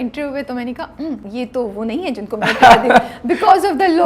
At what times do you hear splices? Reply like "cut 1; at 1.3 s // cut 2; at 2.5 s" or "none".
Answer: cut 1; at 1.2 s

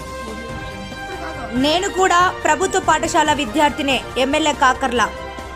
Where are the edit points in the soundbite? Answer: cut 1; at 1.1 s

